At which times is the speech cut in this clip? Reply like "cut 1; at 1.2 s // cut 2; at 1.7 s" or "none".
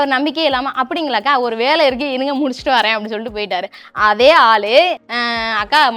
cut 1; at 5.0 s